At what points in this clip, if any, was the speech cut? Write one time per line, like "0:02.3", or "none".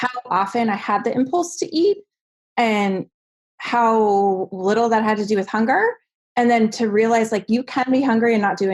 none